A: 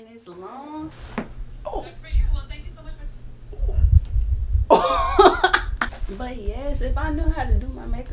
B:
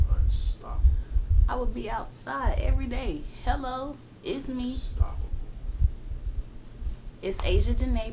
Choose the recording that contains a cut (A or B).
A